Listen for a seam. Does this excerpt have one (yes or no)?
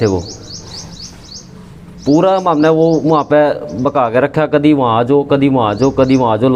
no